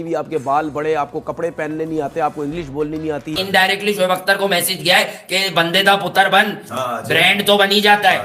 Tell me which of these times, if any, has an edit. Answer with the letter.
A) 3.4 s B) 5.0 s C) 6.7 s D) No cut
A